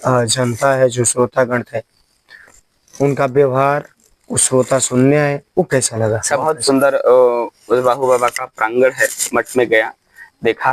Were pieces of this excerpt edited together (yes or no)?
yes